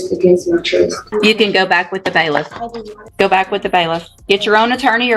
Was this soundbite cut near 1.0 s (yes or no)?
yes